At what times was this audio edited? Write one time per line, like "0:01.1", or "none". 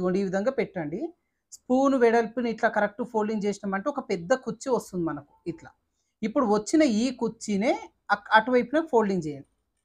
none